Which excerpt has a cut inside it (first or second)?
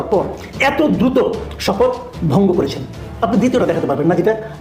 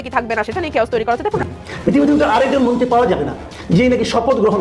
second